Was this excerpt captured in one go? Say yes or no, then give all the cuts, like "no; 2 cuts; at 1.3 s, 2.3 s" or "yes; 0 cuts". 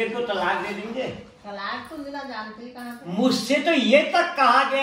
yes; 0 cuts